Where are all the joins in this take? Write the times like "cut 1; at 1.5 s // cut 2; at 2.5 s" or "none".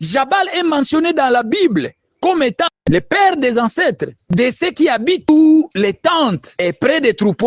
cut 1; at 5.3 s // cut 2; at 6.5 s